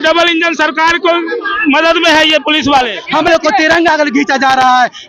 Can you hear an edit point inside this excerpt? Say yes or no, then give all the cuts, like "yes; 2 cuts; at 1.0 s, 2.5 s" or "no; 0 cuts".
yes; 1 cut; at 3.0 s